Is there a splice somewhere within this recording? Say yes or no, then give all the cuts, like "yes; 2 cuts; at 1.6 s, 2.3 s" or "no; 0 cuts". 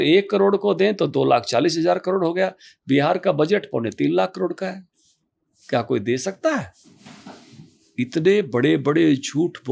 no; 0 cuts